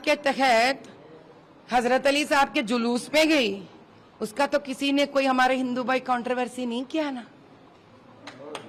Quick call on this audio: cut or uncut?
uncut